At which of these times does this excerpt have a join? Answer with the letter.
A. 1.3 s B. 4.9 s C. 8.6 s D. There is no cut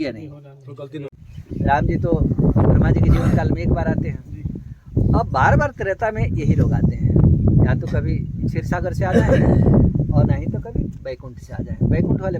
A